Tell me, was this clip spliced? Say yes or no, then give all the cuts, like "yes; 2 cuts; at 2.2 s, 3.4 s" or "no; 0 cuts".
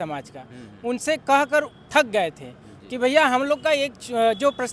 no; 0 cuts